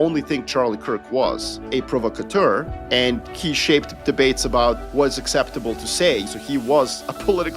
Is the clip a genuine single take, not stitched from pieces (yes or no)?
no